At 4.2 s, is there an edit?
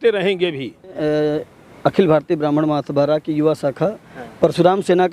no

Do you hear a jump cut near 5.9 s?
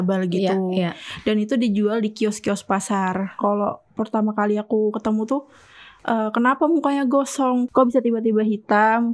no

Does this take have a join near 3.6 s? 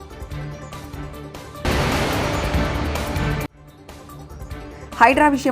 yes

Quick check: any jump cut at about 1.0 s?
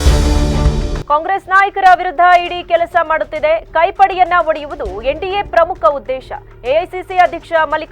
yes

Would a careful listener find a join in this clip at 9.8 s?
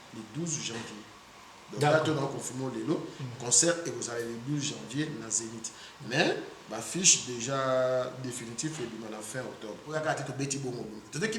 yes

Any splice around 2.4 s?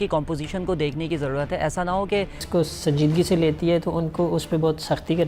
yes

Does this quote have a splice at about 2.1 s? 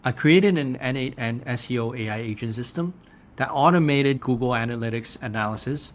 no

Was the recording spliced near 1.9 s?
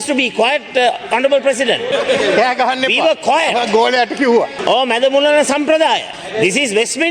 yes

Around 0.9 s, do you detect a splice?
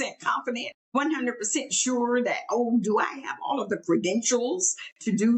yes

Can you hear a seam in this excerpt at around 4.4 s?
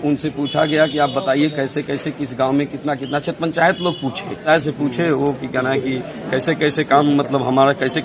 yes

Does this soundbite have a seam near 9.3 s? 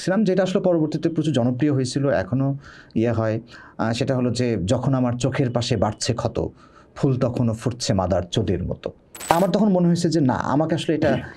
yes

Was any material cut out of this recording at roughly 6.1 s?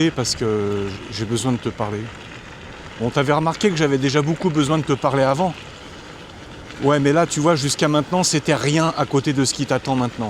no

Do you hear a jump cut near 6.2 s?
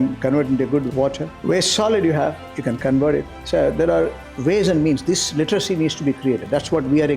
no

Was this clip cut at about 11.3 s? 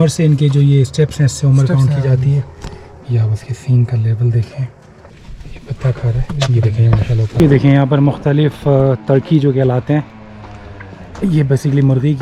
no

